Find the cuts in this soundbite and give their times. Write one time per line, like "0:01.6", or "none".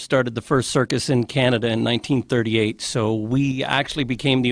none